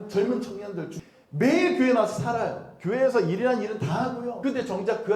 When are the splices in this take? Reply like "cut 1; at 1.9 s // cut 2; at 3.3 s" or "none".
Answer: cut 1; at 0.9 s // cut 2; at 4.3 s